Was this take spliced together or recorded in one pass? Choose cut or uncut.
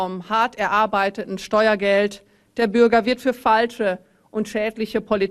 uncut